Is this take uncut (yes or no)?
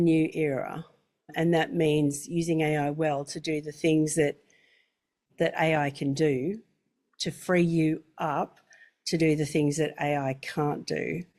yes